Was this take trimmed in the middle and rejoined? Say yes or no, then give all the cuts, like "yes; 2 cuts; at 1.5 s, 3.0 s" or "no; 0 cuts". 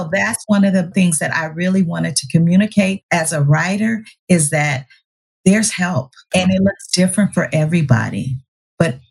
yes; 3 cuts; at 0.9 s, 3.0 s, 6.3 s